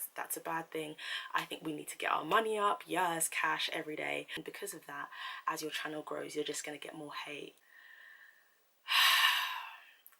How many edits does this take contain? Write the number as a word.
two